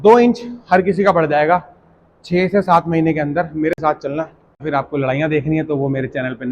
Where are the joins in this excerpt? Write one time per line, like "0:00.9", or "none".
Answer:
0:04.6